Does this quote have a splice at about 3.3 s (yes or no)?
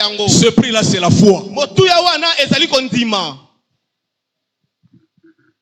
no